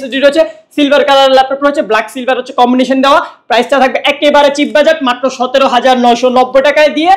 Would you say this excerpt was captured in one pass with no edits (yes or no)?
yes